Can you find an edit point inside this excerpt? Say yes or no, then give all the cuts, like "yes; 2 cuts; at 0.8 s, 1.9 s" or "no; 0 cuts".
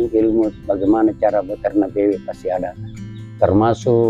no; 0 cuts